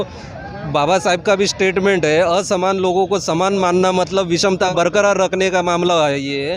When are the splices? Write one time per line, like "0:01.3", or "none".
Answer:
0:04.7